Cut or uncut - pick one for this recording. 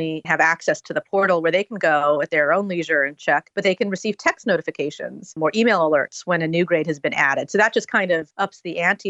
uncut